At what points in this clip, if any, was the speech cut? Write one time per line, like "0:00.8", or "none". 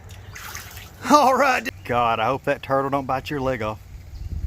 0:01.7

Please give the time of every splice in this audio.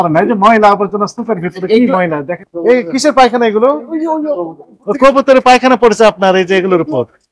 0:02.4

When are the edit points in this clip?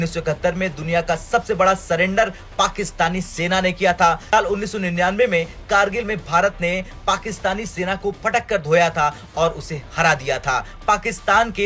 none

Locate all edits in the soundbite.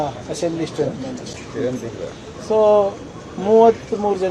none

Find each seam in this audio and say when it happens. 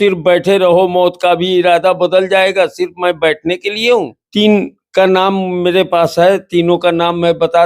0:04.2

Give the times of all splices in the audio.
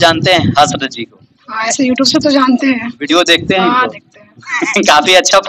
none

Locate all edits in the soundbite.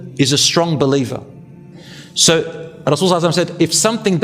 0:01.5

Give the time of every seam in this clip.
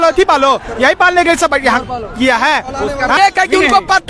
0:03.2

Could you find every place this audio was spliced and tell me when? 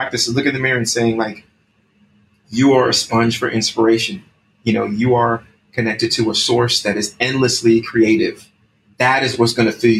0:08.8

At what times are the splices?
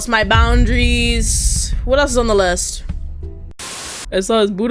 0:03.5

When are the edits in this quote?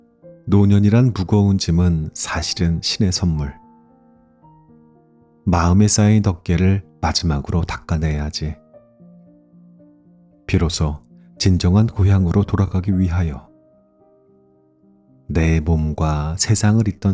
0:03.5
0:05.0
0:08.6
0:10.0
0:13.5
0:15.0

